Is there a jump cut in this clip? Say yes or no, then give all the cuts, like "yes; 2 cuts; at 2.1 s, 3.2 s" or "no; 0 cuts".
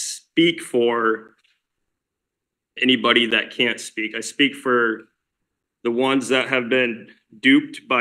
no; 0 cuts